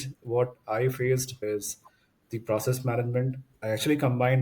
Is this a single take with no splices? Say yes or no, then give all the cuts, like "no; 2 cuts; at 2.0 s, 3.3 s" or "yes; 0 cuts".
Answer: no; 2 cuts; at 1.4 s, 3.5 s